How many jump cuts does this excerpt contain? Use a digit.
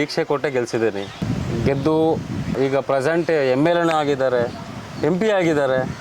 2